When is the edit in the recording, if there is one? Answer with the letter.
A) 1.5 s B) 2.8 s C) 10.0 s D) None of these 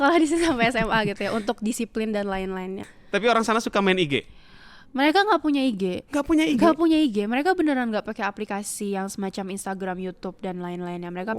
B